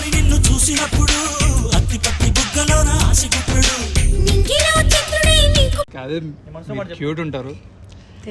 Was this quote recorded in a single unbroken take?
no; 1 cut; at 6.0 s

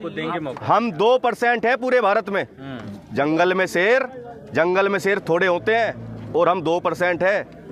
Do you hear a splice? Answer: no; 0 cuts

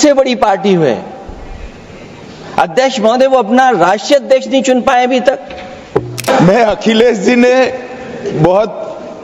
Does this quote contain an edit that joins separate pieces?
yes; 1 cut; at 6.3 s

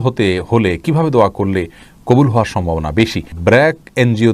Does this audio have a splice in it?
yes; 1 cut; at 3.3 s

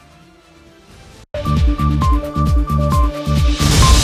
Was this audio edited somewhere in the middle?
no; 0 cuts

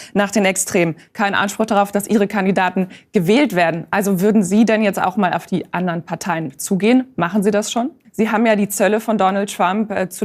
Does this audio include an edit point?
yes; 2 cuts; at 1.0 s, 8.0 s

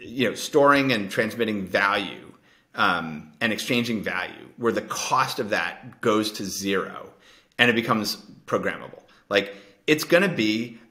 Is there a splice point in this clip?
no; 0 cuts

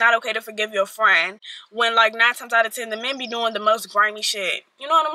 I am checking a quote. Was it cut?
no; 0 cuts

